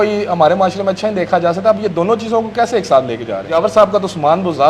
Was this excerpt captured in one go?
no; 1 cut; at 3.4 s

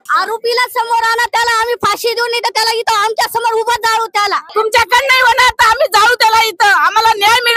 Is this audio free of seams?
no; 1 cut; at 4.5 s

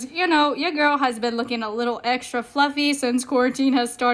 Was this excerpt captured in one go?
yes; 0 cuts

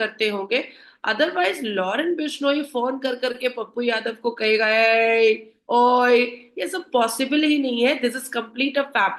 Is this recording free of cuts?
yes; 0 cuts

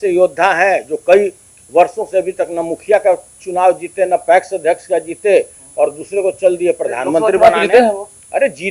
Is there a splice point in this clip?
no; 0 cuts

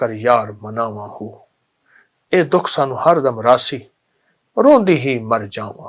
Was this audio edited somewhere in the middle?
no; 0 cuts

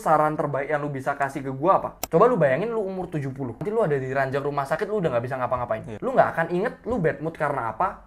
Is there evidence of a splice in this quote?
yes; 3 cuts; at 2.0 s, 3.6 s, 5.9 s

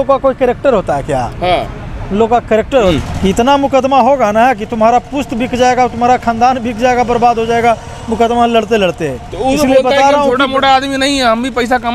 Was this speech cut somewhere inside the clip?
yes; 1 cut; at 2.9 s

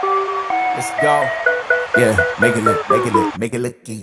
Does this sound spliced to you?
no; 0 cuts

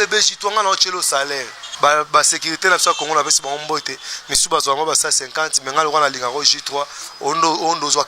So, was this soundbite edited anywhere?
yes; 1 cut; at 1.6 s

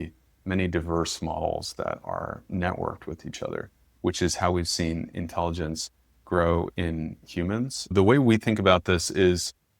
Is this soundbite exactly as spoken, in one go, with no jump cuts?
no; 1 cut; at 7.9 s

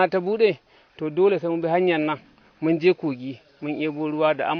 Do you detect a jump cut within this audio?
no; 0 cuts

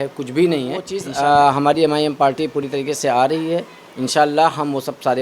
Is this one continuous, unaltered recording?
no; 1 cut; at 1.0 s

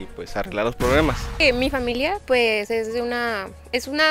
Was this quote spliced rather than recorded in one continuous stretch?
yes; 1 cut; at 1.4 s

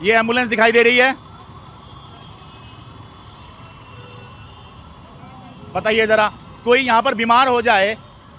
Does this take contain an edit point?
no; 0 cuts

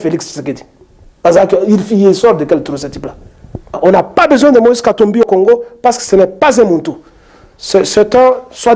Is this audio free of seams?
no; 1 cut; at 3.8 s

